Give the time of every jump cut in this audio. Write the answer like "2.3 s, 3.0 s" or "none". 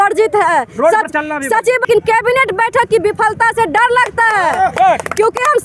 1.9 s